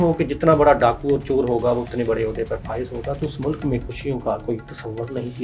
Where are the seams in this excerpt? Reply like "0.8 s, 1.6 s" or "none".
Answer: none

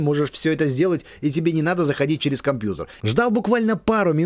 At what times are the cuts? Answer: 2.9 s

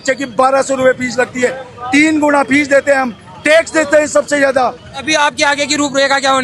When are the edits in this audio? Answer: 5.0 s

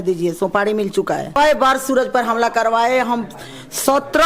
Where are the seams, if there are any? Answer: 1.4 s

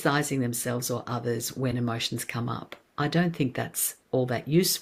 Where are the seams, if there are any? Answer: none

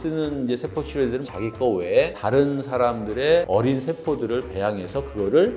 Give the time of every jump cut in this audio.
1.3 s

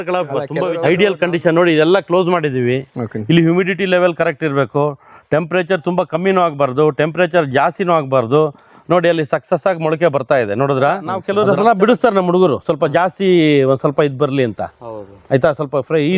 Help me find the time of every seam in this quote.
0.8 s, 11.2 s

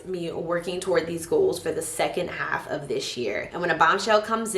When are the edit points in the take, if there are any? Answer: 3.4 s

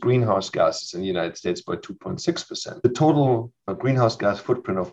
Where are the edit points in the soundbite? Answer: 2.8 s, 3.8 s

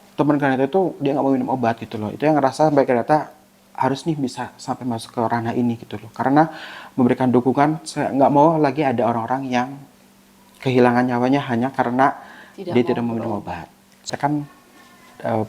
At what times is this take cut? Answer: 14.1 s

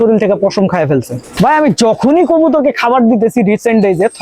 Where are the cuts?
1.3 s

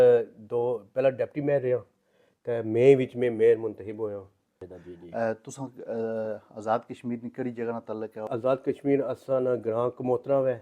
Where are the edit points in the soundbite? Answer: 4.7 s, 8.3 s

